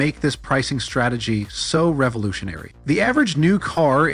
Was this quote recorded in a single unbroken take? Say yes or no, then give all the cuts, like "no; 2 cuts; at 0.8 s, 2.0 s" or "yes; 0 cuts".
no; 1 cut; at 2.7 s